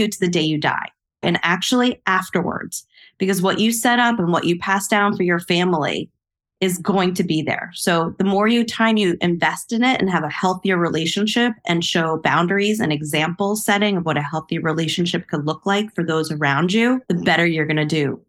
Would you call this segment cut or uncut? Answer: cut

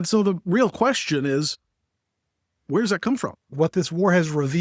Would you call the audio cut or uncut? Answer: cut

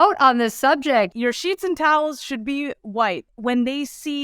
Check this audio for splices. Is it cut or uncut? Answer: cut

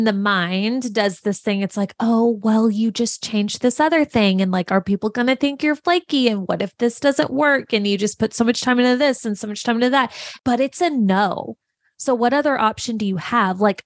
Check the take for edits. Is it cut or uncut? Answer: cut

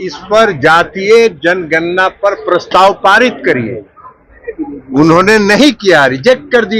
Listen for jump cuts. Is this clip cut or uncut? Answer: uncut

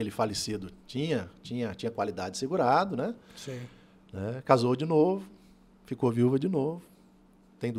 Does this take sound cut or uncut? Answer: uncut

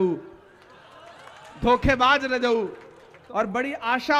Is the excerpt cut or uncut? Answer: cut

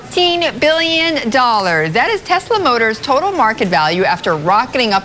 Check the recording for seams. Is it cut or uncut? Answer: uncut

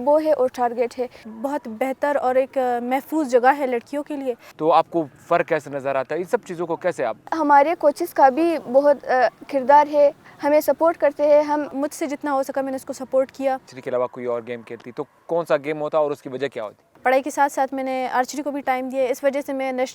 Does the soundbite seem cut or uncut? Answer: cut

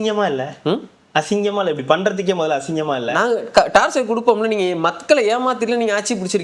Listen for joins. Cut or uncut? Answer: uncut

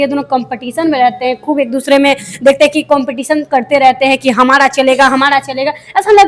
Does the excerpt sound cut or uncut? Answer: uncut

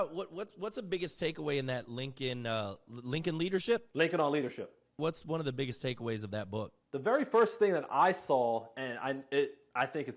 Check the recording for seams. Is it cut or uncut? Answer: cut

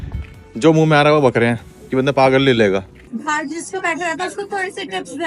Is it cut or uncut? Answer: cut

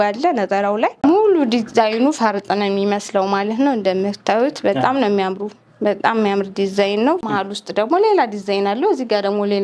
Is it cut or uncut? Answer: cut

